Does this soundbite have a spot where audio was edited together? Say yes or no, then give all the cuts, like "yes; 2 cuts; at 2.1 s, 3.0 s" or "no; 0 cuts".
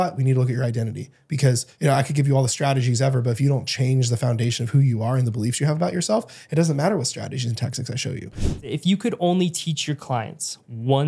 yes; 2 cuts; at 1.7 s, 8.6 s